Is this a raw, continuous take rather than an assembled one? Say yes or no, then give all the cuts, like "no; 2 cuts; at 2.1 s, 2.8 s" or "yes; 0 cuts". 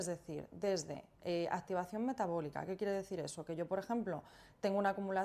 yes; 0 cuts